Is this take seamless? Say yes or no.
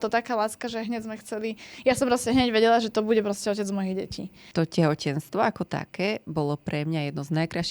no